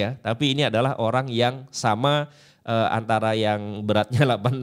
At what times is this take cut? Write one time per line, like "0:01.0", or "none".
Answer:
none

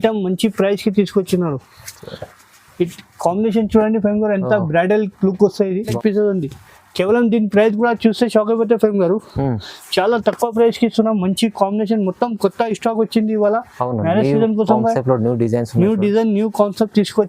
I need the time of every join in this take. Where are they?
0:06.0

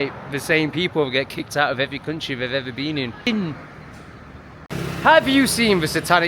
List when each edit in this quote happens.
0:03.3
0:04.6

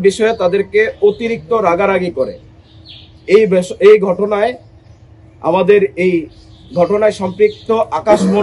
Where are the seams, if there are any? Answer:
none

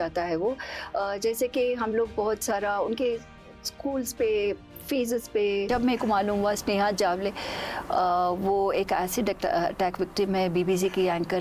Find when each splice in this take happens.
0:05.7

